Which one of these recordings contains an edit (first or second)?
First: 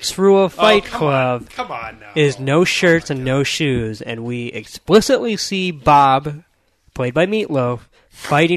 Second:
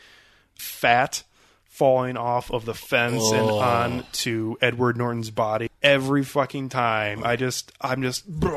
second